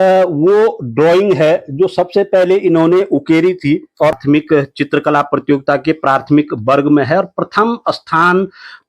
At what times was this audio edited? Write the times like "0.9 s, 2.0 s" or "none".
4.2 s